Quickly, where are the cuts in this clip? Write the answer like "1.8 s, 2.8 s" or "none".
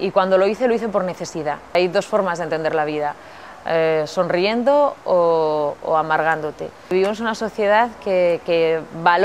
1.7 s, 6.9 s